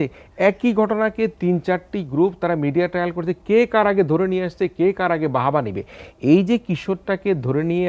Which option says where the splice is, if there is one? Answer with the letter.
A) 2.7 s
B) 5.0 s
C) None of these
C